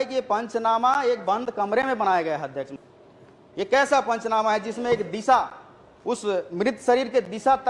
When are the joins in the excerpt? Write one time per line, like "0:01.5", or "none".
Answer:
0:02.8